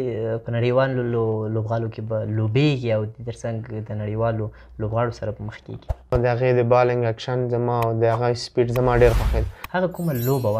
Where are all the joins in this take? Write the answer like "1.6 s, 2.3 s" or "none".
6.1 s, 9.6 s